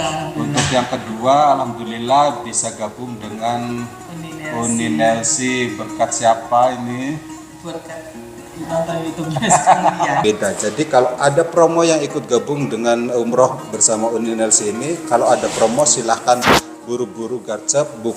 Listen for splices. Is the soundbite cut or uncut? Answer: cut